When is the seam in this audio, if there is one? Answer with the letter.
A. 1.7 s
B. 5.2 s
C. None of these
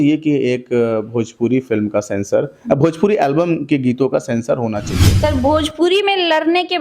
B